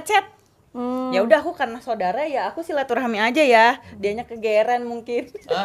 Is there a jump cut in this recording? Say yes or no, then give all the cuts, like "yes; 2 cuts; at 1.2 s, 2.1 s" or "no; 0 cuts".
no; 0 cuts